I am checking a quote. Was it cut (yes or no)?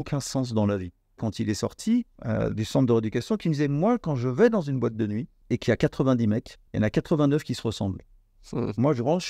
yes